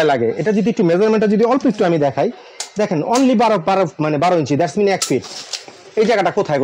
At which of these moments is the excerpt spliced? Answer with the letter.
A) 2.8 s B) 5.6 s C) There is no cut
C